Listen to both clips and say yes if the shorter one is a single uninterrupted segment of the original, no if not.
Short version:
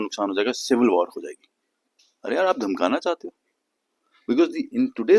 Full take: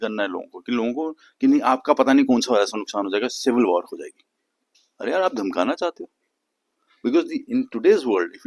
yes